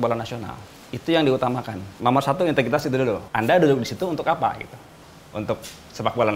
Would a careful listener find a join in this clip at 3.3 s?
yes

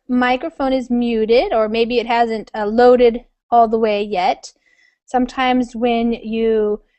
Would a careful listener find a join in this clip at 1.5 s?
no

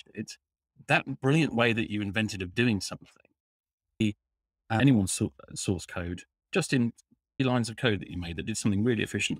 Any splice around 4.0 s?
yes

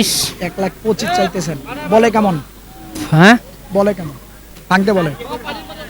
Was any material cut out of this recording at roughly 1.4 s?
no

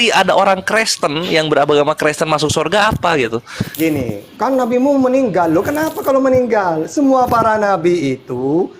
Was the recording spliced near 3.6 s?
yes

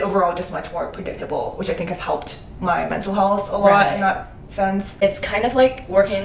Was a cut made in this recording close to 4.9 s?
yes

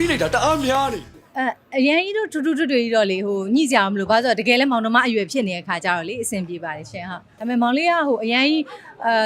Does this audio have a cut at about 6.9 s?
no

